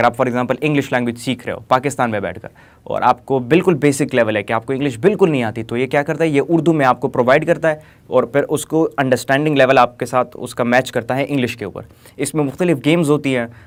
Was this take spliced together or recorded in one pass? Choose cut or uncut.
uncut